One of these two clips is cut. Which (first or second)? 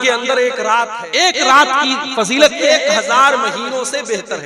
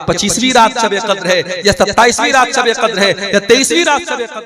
first